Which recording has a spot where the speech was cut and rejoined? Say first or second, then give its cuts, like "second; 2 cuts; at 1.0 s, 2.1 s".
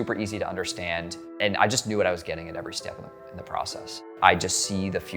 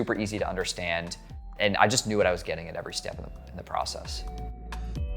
first; 2 cuts; at 1.2 s, 4.0 s